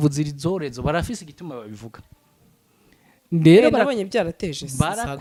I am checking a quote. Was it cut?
no; 0 cuts

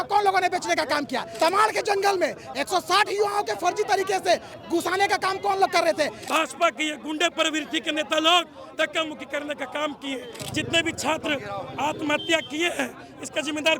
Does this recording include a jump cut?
yes; 3 cuts; at 1.3 s, 6.2 s, 10.4 s

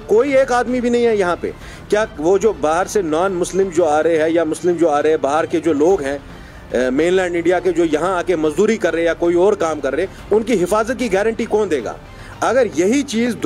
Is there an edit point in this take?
no; 0 cuts

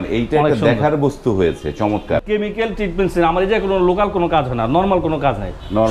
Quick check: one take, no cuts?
no; 1 cut; at 2.2 s

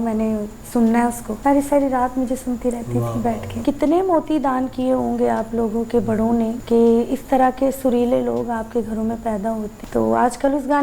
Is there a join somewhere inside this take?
yes; 4 cuts; at 1.3 s, 3.6 s, 6.6 s, 9.7 s

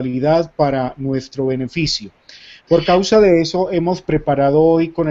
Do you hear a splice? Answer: yes; 1 cut; at 2.5 s

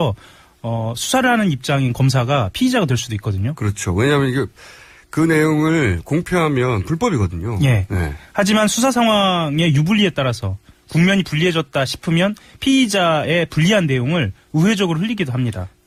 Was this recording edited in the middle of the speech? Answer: no; 0 cuts

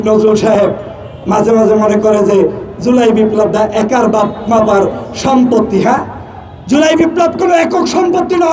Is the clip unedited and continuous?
yes; 0 cuts

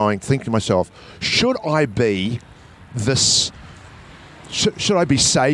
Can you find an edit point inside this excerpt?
no; 0 cuts

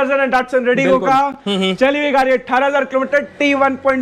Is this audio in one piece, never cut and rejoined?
yes; 0 cuts

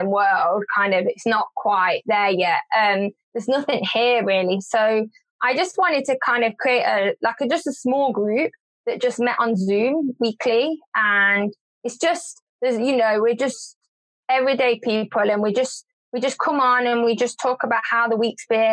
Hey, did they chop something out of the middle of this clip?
no; 0 cuts

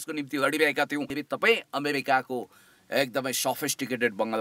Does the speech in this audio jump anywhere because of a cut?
yes; 1 cut; at 1.2 s

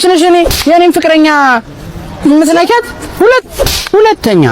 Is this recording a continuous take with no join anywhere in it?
no; 1 cut; at 3.0 s

